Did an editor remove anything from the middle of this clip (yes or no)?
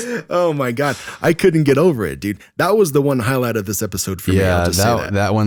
no